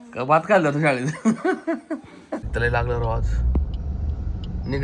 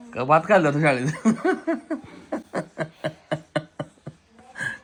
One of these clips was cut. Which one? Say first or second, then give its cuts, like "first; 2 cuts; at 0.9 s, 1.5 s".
first; 1 cut; at 2.5 s